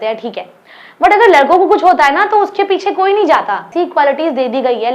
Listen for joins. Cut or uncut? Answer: cut